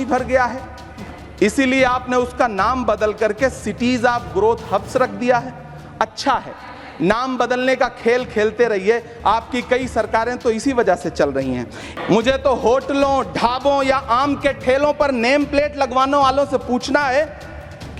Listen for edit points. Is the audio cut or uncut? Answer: cut